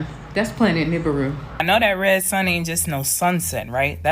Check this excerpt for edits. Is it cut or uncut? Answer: cut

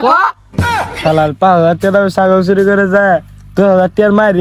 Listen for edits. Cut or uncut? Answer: uncut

